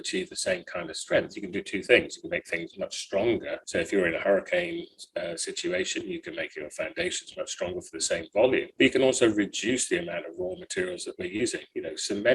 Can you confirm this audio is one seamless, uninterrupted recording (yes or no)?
no